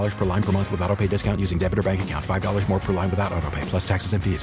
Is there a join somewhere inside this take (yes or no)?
no